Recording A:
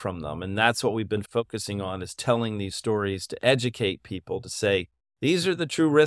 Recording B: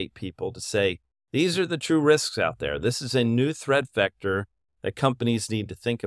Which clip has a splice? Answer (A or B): A